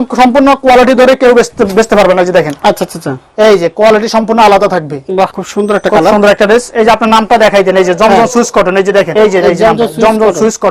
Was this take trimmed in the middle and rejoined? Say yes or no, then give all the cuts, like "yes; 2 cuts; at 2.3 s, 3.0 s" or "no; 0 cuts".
yes; 2 cuts; at 5.4 s, 9.1 s